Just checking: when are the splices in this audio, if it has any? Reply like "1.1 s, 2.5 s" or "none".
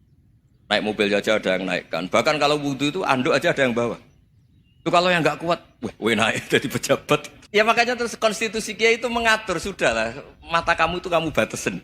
7.4 s